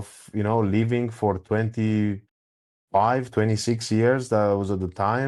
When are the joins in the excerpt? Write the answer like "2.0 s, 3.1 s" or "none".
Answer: none